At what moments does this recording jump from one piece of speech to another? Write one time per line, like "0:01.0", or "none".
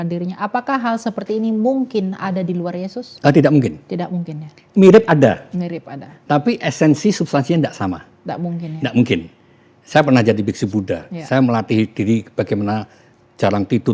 0:03.0
0:04.6